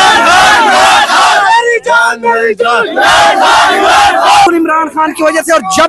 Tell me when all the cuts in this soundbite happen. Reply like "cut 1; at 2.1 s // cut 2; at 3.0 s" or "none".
cut 1; at 4.5 s